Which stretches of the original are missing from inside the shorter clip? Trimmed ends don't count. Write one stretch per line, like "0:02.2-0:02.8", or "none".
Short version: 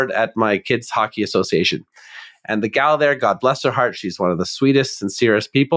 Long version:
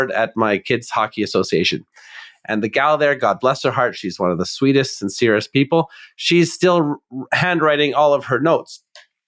none